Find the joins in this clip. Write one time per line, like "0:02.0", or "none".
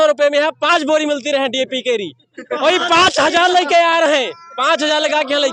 none